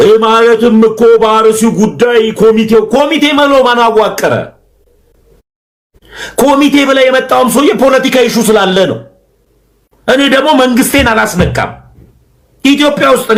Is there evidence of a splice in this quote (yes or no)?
no